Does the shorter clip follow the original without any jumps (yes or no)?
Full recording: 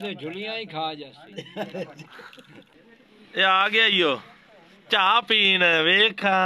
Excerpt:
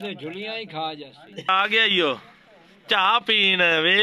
no